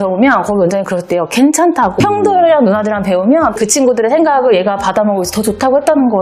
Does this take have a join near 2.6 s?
no; 0 cuts

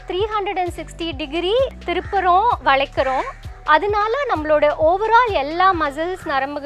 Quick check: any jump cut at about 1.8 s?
yes; 1 cut; at 1.8 s

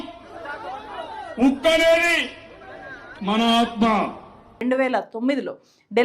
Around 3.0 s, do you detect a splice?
no; 1 cut; at 4.6 s

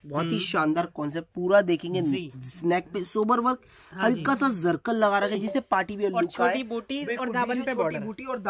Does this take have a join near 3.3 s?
no; 0 cuts

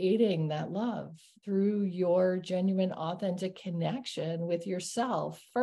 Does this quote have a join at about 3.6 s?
no; 1 cut; at 1.4 s

